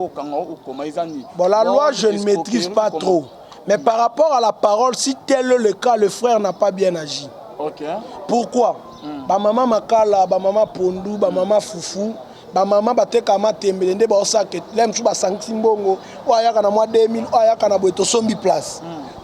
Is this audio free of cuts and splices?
yes; 0 cuts

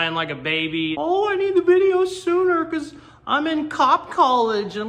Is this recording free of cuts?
no; 1 cut; at 1.0 s

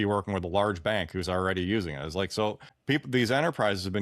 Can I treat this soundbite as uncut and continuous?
no; 1 cut; at 2.7 s

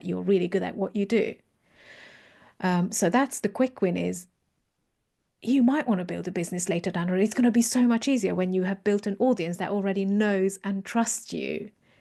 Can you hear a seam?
no; 0 cuts

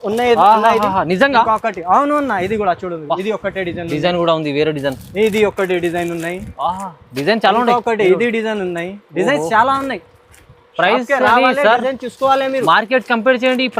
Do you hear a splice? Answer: no; 0 cuts

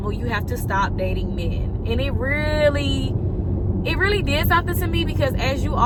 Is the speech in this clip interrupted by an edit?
no; 0 cuts

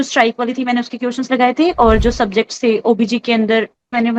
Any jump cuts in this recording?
no; 0 cuts

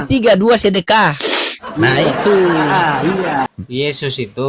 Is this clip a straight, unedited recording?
no; 1 cut; at 3.6 s

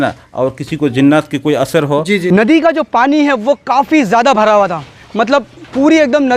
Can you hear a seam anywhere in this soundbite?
yes; 1 cut; at 2.2 s

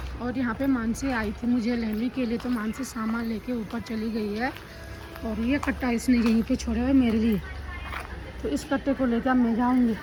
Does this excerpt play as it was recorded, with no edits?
yes; 0 cuts

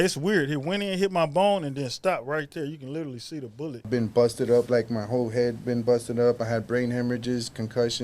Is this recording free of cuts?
no; 1 cut; at 3.9 s

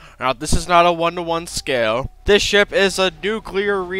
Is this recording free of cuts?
no; 1 cut; at 2.1 s

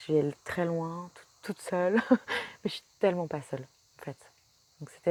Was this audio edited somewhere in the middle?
no; 0 cuts

